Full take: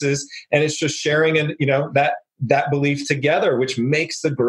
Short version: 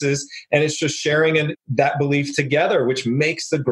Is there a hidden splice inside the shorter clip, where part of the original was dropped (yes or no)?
yes